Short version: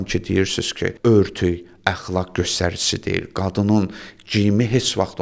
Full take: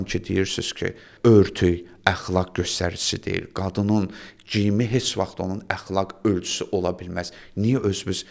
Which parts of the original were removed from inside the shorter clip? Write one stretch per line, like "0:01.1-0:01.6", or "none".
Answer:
0:00.9-0:01.1